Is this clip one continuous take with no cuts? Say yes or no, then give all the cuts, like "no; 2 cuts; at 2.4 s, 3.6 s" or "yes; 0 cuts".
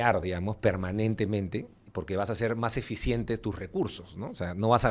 yes; 0 cuts